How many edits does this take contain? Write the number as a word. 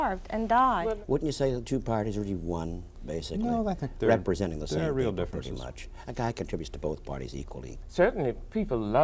two